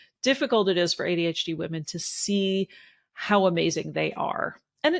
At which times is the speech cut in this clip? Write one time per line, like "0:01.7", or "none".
none